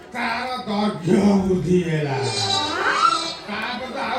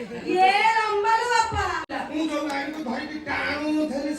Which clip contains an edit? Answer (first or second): second